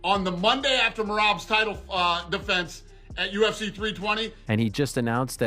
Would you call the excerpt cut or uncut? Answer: cut